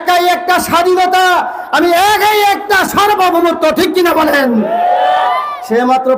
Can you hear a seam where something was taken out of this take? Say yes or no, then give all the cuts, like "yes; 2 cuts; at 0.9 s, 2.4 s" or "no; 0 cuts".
no; 0 cuts